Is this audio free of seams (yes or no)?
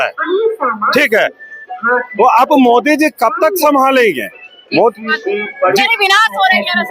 no